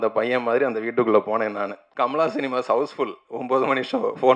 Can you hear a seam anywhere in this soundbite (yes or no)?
yes